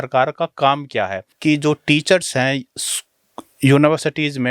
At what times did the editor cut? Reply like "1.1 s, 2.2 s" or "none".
1.2 s